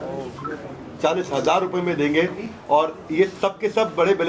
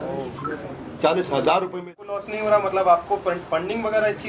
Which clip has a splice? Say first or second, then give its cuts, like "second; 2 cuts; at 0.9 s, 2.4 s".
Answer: second; 1 cut; at 1.9 s